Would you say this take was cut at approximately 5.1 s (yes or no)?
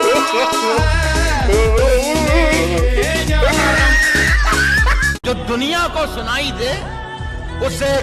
yes